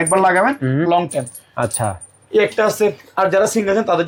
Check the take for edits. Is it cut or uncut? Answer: uncut